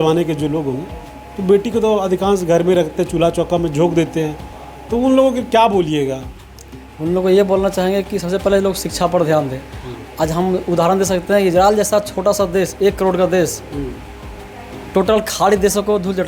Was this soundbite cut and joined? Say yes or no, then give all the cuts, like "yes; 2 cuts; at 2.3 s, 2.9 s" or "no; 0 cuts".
no; 0 cuts